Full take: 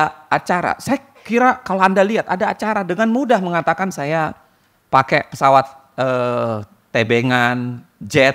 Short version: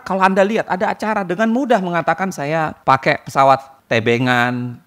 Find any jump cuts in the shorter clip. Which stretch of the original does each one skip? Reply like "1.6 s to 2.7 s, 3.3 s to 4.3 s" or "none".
4.3 s to 4.8 s, 5.8 s to 6.8 s